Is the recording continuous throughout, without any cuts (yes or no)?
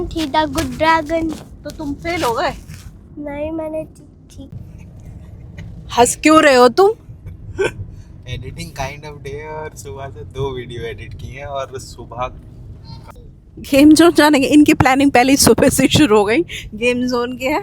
no